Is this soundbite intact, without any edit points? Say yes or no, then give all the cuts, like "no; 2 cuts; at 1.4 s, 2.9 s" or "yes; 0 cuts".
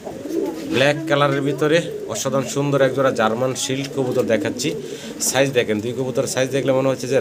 yes; 0 cuts